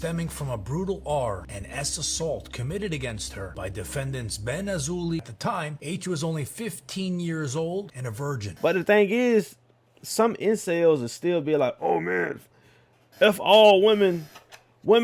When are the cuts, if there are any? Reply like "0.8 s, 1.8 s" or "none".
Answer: 5.3 s, 8.6 s